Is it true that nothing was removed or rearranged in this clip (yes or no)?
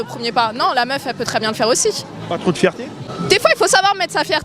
no